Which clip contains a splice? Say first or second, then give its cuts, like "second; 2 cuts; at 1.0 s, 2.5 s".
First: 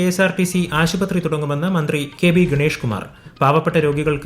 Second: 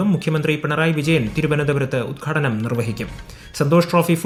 first; 1 cut; at 2.1 s